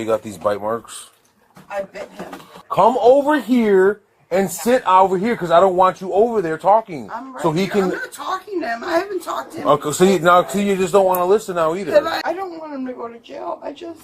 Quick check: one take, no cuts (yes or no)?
no